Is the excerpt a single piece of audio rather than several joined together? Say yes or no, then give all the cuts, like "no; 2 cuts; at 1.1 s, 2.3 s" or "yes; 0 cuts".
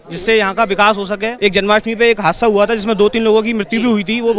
no; 1 cut; at 1.3 s